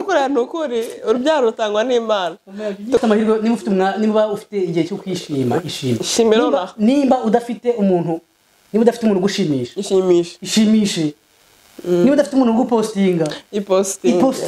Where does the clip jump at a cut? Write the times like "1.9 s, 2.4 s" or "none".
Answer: 3.0 s